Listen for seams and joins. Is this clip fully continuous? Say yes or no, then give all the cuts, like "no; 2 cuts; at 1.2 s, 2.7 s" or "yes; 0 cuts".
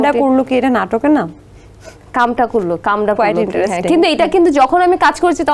yes; 0 cuts